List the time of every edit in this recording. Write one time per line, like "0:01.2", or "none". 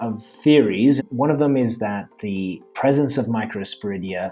0:01.0